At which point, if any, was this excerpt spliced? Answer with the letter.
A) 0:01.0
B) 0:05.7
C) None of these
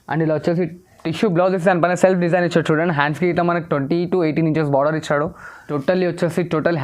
B